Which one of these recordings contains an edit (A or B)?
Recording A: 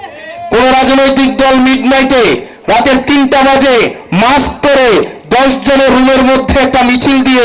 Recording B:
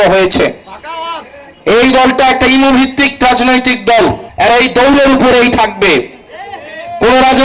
B